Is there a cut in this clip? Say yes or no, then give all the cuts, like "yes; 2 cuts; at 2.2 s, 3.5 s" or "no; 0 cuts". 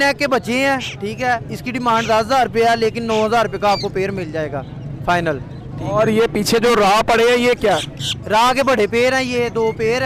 no; 0 cuts